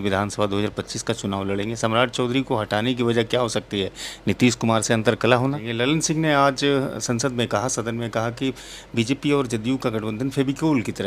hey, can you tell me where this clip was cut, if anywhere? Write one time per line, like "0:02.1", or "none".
0:05.7